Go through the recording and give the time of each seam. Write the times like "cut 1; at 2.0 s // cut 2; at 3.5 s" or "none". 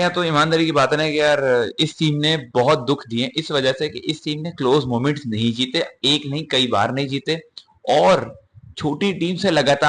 none